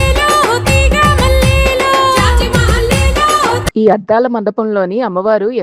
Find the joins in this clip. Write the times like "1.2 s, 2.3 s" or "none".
3.7 s